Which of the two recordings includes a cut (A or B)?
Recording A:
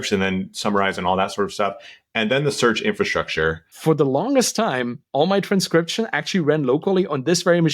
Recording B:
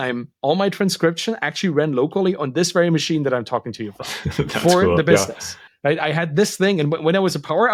A